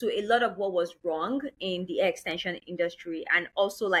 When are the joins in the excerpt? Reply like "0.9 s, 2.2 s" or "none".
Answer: none